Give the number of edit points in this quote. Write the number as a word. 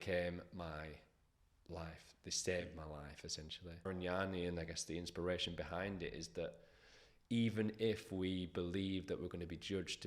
one